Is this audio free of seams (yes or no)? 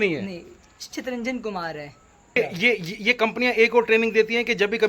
no